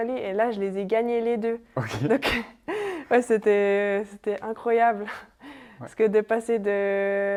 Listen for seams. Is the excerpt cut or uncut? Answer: uncut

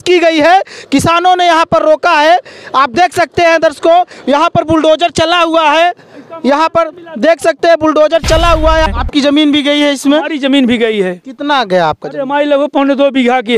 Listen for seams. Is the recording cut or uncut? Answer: cut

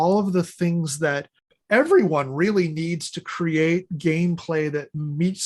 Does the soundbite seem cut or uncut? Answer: uncut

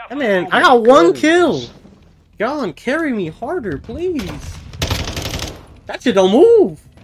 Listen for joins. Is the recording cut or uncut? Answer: uncut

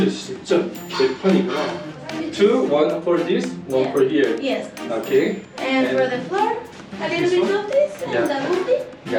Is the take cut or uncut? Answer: uncut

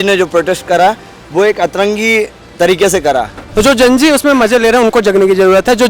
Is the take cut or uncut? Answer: cut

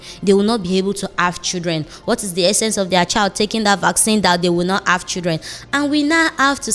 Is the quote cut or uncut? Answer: uncut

